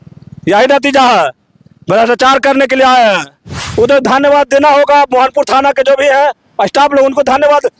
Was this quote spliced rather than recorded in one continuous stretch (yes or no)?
yes